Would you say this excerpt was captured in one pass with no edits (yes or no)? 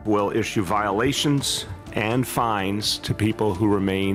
yes